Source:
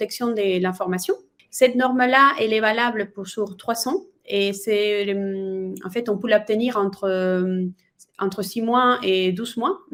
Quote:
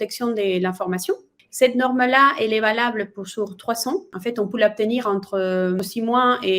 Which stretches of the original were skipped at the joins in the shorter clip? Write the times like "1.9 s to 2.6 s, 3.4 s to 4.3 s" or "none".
4.1 s to 5.8 s, 7.5 s to 8.4 s